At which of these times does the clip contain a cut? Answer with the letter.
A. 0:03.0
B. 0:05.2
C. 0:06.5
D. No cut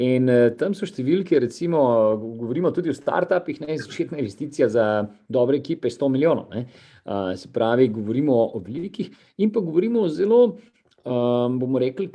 D